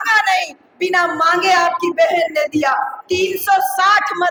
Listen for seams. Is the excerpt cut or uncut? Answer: uncut